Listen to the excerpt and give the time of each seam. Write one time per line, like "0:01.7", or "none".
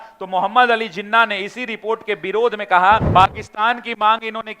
0:03.1